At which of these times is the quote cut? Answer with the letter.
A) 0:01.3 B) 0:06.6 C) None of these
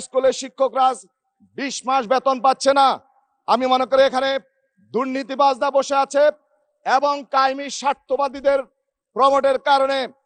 C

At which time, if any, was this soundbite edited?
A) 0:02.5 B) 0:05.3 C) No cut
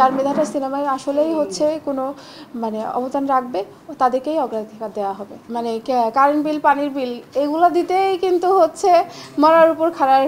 B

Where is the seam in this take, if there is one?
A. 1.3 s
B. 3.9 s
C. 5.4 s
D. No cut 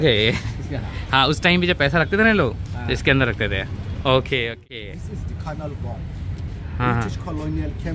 D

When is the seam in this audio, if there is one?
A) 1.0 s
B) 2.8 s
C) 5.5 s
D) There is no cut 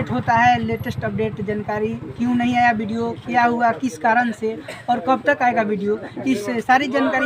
D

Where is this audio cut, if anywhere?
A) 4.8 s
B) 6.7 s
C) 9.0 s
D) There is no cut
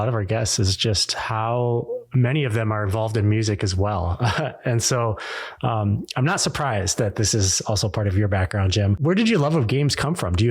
C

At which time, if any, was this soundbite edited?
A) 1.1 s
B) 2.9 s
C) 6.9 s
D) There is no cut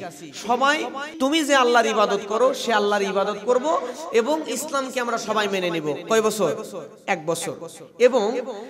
A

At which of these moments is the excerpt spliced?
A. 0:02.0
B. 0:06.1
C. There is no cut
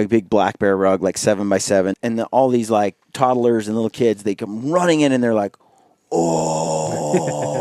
A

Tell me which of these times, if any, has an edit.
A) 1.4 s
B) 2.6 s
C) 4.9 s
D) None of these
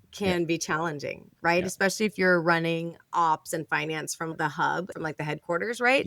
C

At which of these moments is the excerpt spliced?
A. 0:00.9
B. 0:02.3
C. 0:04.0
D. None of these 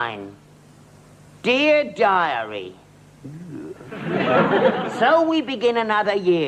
D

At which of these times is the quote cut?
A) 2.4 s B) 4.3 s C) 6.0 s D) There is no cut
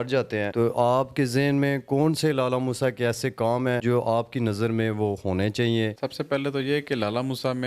D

